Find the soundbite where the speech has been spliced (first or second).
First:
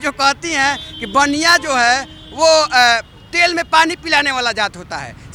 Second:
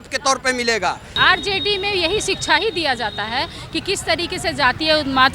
second